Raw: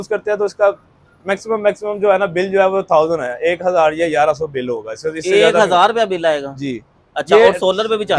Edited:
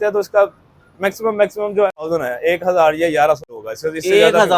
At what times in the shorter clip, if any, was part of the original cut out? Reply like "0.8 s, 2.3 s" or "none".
2.1 s, 3.5 s